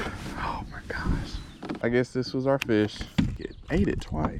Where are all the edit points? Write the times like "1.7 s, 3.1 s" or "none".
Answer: 1.8 s, 3.5 s